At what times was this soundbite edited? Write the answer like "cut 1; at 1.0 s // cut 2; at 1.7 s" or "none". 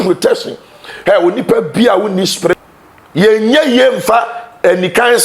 cut 1; at 2.5 s

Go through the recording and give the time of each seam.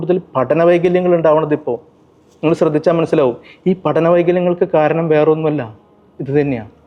none

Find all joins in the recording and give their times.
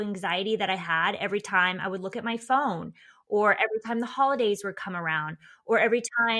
none

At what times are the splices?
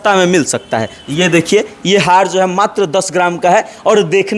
cut 1; at 1.0 s

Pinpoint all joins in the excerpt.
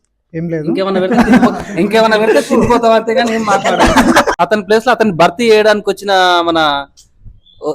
cut 1; at 4.3 s

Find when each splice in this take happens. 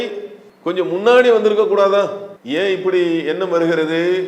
none

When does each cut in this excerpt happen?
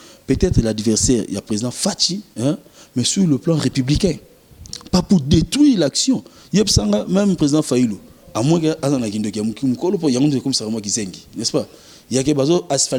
none

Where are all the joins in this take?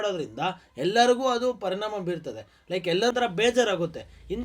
cut 1; at 3.1 s

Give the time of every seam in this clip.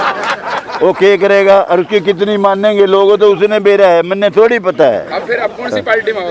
none

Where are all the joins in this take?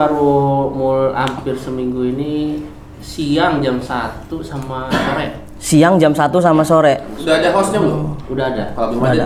none

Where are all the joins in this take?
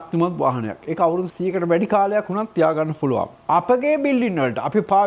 cut 1; at 1.3 s // cut 2; at 3.3 s

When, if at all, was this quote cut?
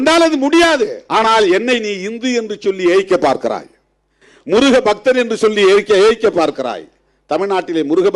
cut 1; at 1.0 s

